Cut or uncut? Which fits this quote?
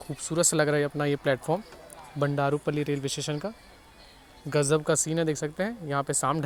uncut